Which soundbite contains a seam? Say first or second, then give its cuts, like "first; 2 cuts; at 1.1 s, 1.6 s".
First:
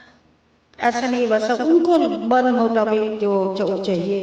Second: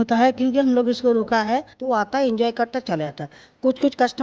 second; 1 cut; at 1.7 s